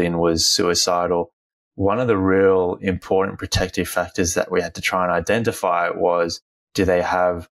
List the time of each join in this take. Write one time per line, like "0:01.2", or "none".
none